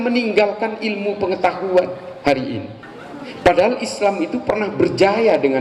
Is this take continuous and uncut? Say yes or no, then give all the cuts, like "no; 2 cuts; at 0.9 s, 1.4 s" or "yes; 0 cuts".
yes; 0 cuts